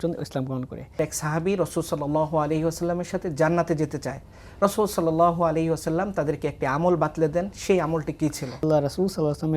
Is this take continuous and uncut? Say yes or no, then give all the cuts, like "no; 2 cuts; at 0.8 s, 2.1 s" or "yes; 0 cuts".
no; 2 cuts; at 1.0 s, 8.6 s